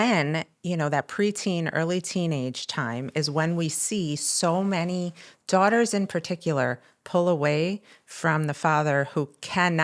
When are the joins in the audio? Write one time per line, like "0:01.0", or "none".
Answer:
none